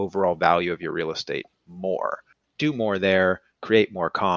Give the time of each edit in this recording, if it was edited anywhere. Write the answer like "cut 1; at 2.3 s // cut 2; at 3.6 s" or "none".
cut 1; at 2.2 s